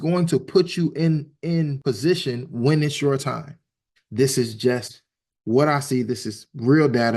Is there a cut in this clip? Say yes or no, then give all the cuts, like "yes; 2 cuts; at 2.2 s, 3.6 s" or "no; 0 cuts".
yes; 1 cut; at 3.8 s